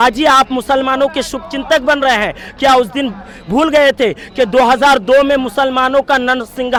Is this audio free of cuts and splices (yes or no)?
yes